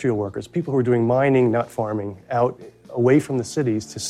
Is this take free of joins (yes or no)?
yes